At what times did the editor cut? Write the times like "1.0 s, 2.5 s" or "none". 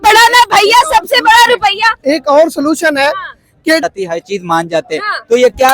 3.8 s